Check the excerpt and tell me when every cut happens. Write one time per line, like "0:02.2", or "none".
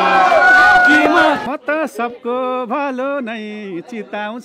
0:01.4

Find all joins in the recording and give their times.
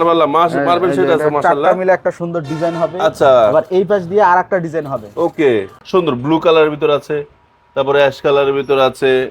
0:05.8

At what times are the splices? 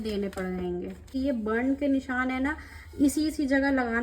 0:01.1

